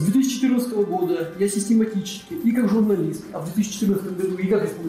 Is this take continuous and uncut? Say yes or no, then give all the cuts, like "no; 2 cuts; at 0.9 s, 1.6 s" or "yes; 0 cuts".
yes; 0 cuts